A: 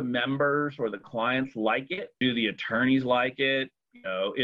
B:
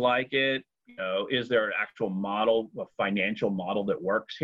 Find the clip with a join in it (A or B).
A